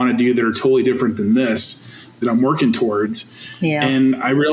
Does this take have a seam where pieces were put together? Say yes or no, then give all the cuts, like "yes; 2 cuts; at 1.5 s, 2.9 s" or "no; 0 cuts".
no; 0 cuts